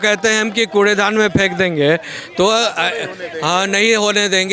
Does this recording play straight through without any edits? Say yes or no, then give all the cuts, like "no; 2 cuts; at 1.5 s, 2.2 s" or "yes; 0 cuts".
yes; 0 cuts